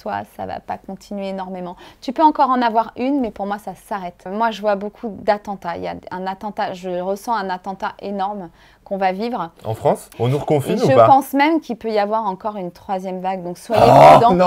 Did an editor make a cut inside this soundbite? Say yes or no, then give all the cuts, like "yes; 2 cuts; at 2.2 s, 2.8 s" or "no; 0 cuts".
yes; 2 cuts; at 4.2 s, 10.1 s